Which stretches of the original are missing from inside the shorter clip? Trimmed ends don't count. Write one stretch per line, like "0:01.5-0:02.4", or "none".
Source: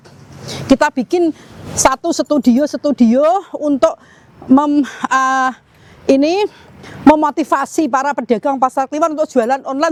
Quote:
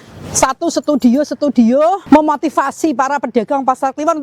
0:03.4-0:06.9

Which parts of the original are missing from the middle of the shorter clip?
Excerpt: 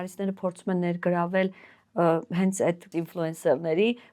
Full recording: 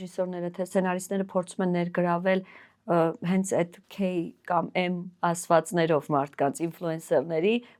0:03.8-0:06.6

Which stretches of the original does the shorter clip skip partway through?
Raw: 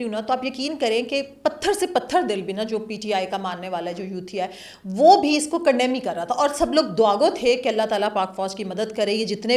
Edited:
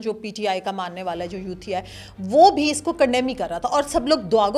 none

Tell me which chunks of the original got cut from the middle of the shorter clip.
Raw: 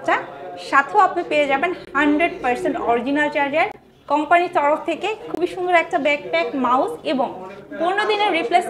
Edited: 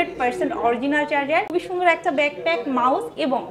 0:03.7-0:05.3

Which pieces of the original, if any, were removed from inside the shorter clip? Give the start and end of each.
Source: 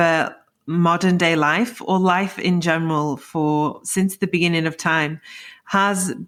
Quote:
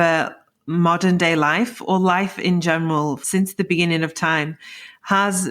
0:03.2-0:03.8

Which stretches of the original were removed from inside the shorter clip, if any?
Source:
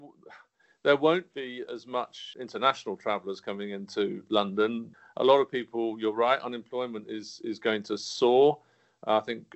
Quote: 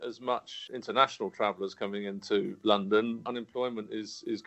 0:05.0-0:06.5

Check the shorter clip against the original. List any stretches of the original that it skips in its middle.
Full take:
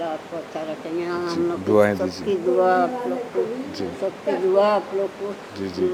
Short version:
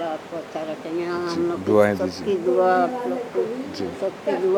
none

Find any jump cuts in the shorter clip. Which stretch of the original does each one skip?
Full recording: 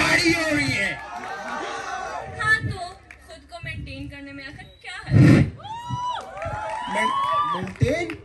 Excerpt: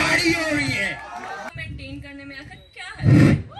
0:01.5-0:03.6

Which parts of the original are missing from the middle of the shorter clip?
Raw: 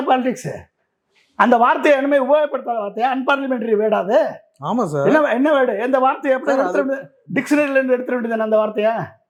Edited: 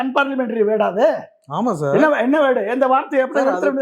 none

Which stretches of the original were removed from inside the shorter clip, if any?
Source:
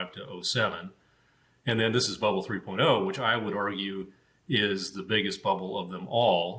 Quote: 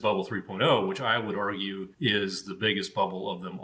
0:04.0-0:04.3

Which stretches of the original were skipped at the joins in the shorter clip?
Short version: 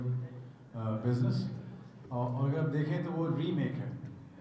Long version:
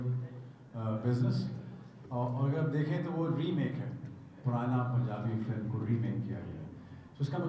none

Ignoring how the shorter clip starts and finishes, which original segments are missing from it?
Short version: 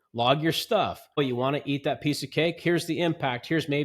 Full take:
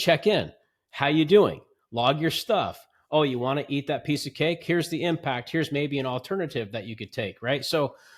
0:03.0-0:03.2

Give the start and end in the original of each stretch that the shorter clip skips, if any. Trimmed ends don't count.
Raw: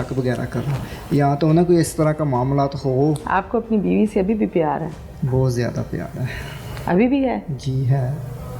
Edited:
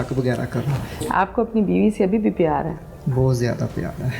0:01.0-0:03.2

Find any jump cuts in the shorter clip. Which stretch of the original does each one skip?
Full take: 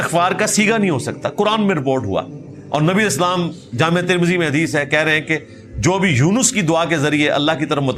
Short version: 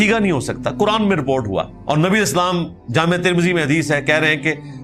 0:02.3-0:02.6

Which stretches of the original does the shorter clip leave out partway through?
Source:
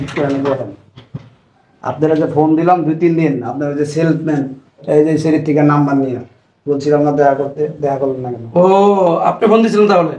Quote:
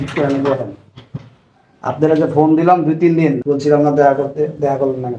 0:03.4-0:06.6

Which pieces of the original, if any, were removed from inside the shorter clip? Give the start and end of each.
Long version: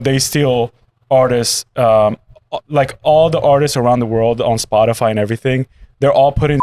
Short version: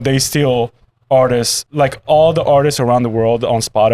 0:01.6-0:02.6

